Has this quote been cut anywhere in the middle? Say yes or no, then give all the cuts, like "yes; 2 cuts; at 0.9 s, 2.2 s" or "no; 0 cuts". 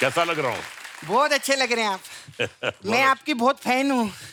no; 0 cuts